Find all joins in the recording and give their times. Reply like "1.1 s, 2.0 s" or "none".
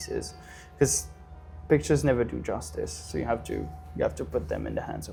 none